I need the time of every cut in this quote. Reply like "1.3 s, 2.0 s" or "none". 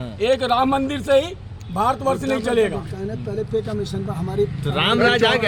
none